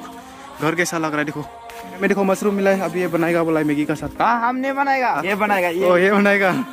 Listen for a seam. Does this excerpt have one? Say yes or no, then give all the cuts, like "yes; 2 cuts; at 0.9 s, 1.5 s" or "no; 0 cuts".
yes; 2 cuts; at 2.0 s, 5.2 s